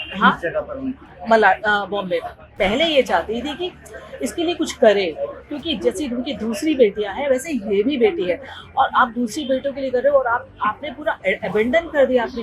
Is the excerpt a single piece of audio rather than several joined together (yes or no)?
no